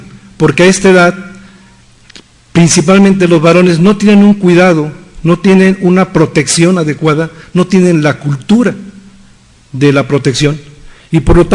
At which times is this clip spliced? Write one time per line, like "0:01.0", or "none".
none